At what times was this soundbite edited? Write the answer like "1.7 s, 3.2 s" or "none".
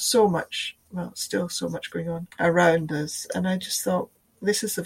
2.3 s